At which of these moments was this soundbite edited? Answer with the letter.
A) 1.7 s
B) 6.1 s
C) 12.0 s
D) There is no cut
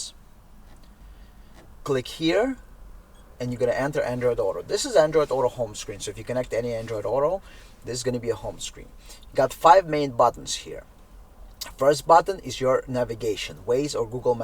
A